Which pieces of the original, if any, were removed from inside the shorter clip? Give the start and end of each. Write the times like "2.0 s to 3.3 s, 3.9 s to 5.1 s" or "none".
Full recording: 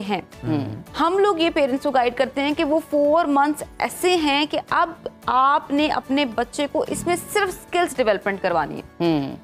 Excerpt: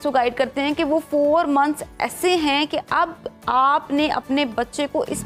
none